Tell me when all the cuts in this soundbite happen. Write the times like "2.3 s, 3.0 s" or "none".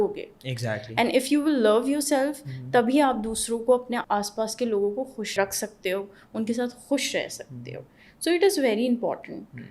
4.0 s, 5.4 s